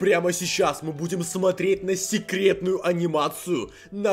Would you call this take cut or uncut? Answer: uncut